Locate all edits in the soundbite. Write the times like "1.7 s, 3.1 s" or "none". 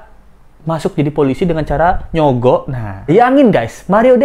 3.1 s